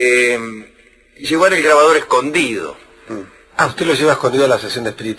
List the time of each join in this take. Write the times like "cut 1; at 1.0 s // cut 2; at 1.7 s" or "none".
none